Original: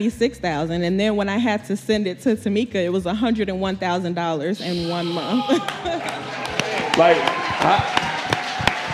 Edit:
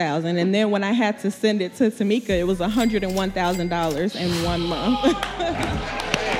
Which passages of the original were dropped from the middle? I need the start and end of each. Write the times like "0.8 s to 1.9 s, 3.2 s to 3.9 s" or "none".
none

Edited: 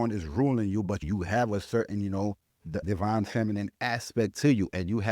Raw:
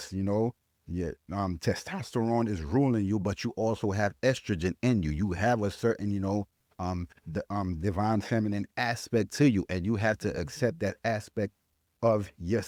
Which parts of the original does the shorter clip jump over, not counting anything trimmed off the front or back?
3.4 s to 5.1 s, 6.8 s to 7.7 s

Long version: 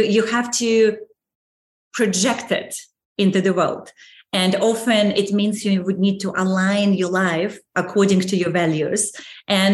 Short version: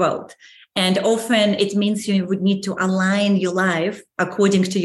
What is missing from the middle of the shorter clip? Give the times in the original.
none

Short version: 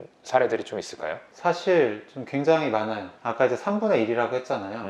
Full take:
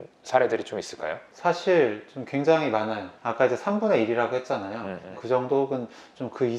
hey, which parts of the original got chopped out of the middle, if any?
none

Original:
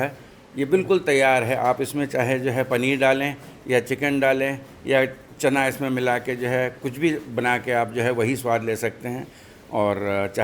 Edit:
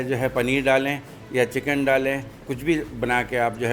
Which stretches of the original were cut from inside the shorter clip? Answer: 4.8 s to 6.8 s

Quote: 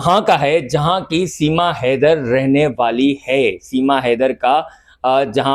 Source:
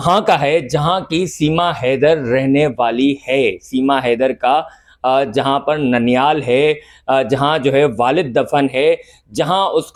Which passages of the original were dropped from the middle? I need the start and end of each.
none

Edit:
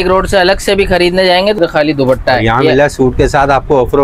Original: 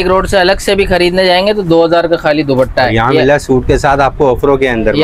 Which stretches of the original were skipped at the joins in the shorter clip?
1.6 s to 2.1 s

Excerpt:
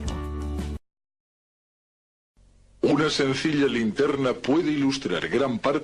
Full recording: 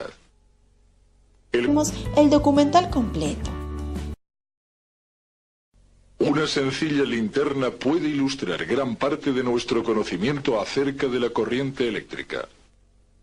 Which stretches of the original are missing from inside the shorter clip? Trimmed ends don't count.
none

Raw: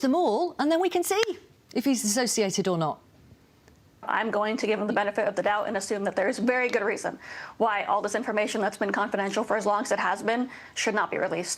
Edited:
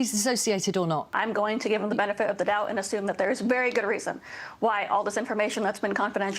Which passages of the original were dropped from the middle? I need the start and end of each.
3.0 s to 4.1 s

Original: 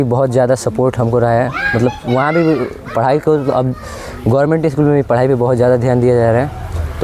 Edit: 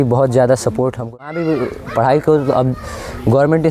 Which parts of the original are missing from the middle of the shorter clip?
1.0 s to 2.0 s

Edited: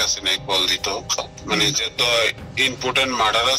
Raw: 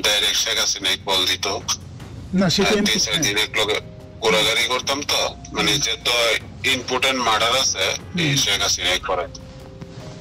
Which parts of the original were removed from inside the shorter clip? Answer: 1.9 s to 5.4 s

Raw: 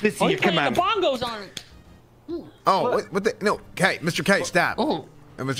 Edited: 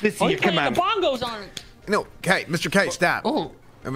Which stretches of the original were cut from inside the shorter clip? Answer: 1.8 s to 3.4 s

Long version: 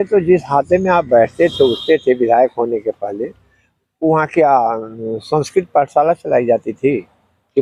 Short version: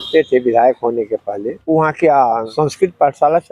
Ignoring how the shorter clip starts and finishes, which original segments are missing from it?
3.2 s to 3.8 s, 4.8 s to 5.2 s

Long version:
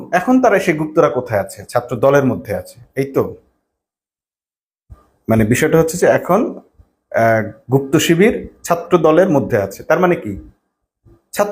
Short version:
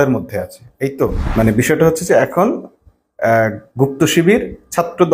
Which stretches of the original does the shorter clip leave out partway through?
3.4 s to 5.1 s

